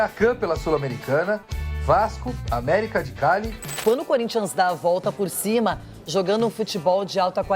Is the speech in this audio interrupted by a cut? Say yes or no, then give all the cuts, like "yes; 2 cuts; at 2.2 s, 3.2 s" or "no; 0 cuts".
yes; 1 cut; at 3.6 s